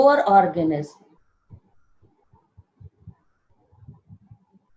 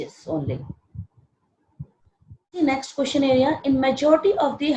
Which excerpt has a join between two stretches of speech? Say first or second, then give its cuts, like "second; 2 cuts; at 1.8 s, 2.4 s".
second; 1 cut; at 2.6 s